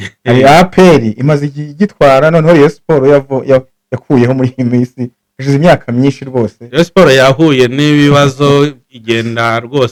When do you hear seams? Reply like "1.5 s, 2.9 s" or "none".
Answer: none